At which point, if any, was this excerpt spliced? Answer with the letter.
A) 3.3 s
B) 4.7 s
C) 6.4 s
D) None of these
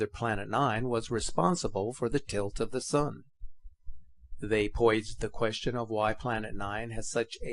A